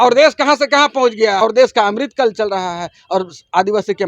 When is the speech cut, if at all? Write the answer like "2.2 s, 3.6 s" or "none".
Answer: 1.4 s